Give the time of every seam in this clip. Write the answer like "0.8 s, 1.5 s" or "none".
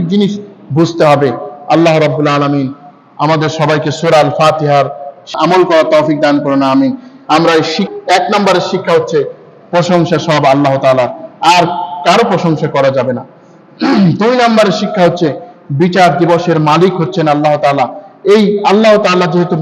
5.3 s, 7.9 s